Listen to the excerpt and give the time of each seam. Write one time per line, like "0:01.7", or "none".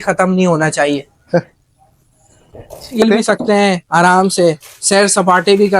0:03.0